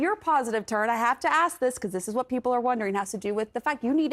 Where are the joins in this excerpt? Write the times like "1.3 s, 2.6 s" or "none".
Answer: none